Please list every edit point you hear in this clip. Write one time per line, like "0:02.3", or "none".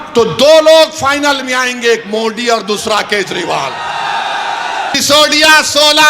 0:04.9